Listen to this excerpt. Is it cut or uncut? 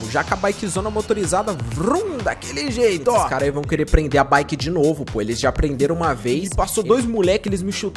cut